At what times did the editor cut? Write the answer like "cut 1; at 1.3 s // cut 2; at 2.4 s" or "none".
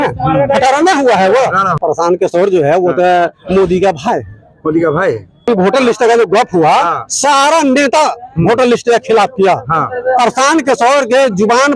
cut 1; at 1.8 s // cut 2; at 5.5 s